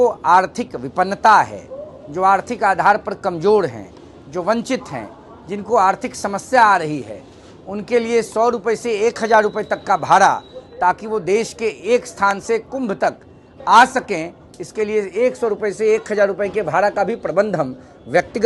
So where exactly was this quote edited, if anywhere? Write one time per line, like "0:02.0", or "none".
none

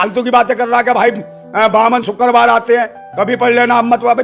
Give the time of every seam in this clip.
none

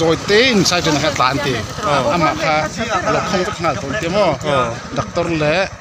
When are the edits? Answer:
none

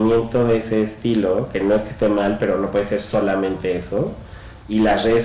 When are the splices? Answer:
none

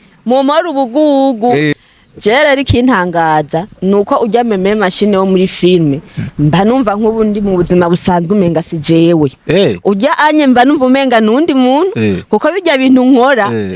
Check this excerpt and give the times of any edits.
0:01.7

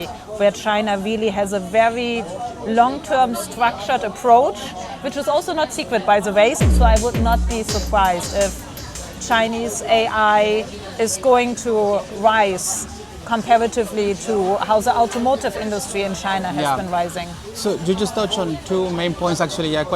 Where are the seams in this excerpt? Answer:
0:06.6

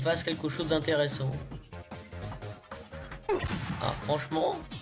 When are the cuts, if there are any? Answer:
none

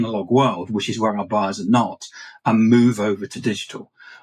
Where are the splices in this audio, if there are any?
0:03.3

